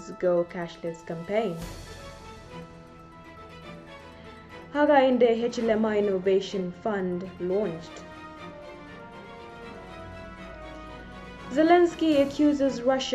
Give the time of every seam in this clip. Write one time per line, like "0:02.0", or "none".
none